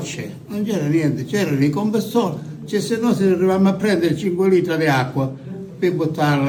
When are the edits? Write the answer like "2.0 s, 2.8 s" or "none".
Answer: none

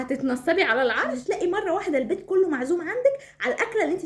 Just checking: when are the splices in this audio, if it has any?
1.1 s

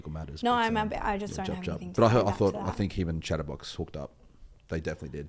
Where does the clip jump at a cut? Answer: none

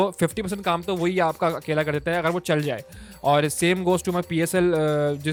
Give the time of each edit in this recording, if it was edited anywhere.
none

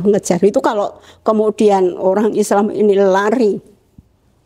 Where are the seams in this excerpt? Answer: none

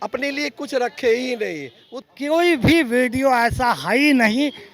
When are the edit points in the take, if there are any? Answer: 2.0 s

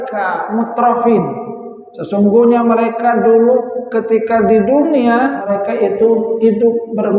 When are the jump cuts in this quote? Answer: 5.4 s

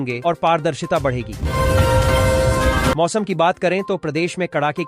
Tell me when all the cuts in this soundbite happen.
1.3 s, 3.0 s

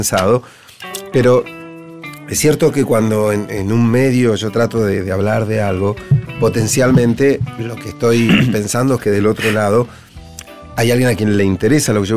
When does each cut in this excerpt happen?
9.2 s

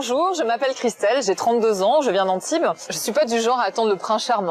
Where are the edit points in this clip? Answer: 2.9 s

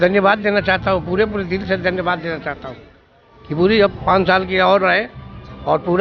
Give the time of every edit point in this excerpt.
none

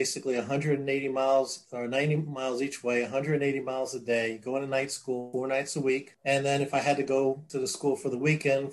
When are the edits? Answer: 5.3 s, 6.1 s, 7.5 s

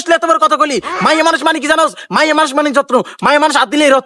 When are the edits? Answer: none

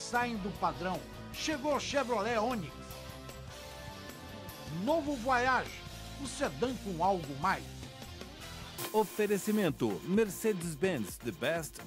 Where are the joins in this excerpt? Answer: 8.7 s

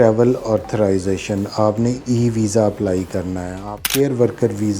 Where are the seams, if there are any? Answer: 3.7 s

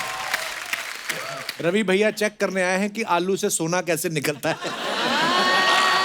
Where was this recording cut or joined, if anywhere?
1.5 s

